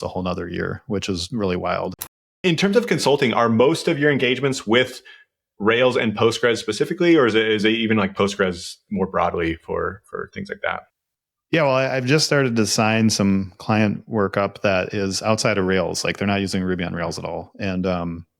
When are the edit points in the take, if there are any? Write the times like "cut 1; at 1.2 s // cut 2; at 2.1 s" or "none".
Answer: cut 1; at 1.9 s

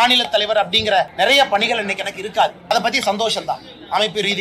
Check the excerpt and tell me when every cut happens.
cut 1; at 1.1 s // cut 2; at 2.7 s

